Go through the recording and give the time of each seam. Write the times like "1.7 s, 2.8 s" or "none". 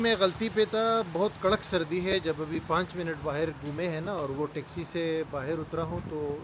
none